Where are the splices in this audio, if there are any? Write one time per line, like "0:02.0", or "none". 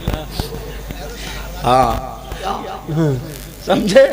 0:02.5